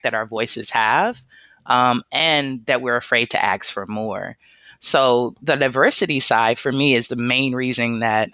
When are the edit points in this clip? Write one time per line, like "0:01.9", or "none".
none